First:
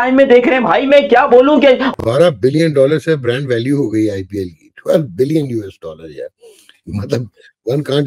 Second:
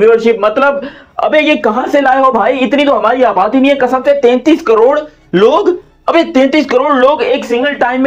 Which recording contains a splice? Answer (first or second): first